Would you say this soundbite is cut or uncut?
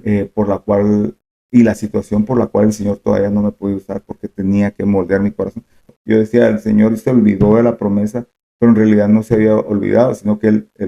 cut